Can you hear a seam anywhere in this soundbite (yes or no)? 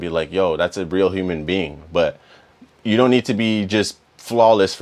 no